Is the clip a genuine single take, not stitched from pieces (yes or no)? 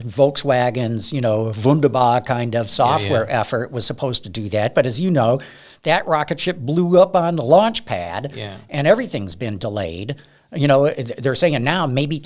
yes